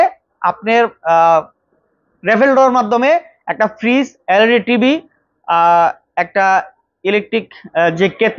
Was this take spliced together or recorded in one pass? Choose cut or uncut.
uncut